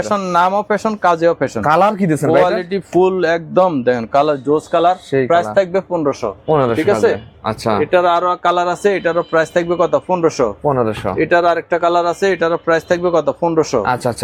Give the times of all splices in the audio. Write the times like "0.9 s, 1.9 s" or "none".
none